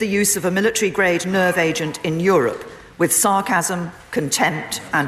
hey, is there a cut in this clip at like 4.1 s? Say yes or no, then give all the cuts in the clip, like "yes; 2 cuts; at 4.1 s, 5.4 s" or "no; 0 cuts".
no; 0 cuts